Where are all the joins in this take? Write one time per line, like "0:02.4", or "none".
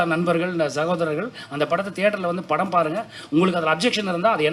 none